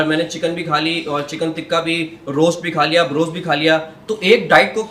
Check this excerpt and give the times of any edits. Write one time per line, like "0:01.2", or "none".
none